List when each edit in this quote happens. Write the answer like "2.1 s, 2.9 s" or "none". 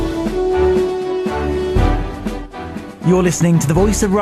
none